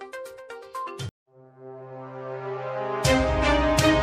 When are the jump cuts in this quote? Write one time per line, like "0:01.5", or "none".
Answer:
none